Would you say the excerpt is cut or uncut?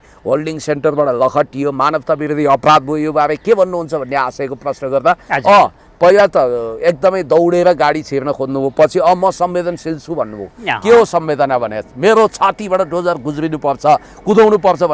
uncut